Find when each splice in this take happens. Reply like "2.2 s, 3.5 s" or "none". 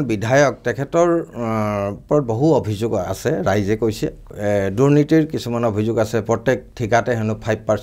4.3 s